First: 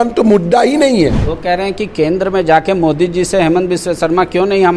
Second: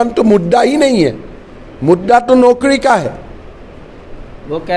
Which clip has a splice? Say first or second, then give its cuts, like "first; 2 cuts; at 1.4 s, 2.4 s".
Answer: first; 1 cut; at 1.3 s